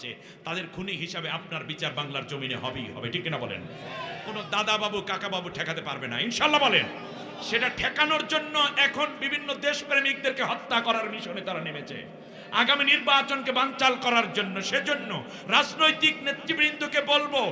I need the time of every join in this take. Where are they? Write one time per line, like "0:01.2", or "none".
none